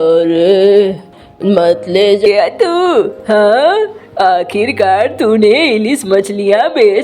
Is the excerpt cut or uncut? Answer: cut